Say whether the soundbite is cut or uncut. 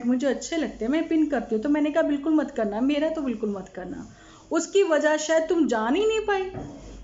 uncut